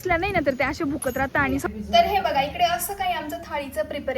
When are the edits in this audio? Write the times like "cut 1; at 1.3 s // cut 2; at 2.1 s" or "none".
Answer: cut 1; at 1.6 s